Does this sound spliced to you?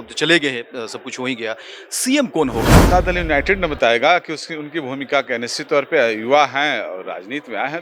yes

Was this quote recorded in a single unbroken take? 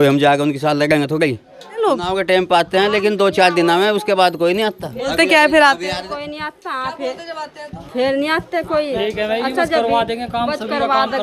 no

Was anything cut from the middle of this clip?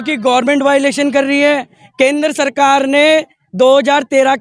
yes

